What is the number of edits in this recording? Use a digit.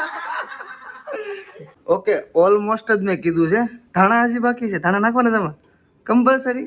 1